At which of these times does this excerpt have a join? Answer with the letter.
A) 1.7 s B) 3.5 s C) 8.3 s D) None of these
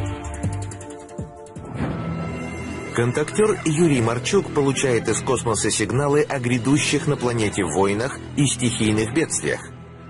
C